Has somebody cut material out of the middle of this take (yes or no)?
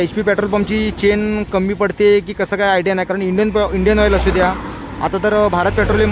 no